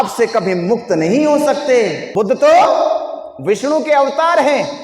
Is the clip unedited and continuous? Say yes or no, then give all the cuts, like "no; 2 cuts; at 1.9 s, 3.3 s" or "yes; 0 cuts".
no; 1 cut; at 2.0 s